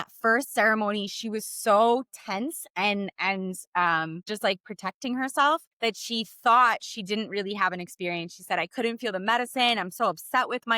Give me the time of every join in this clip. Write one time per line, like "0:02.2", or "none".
0:04.3